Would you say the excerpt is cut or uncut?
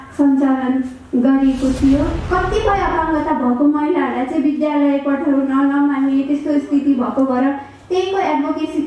cut